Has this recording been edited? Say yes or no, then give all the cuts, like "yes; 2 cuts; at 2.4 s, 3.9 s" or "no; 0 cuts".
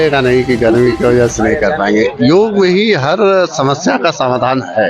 no; 0 cuts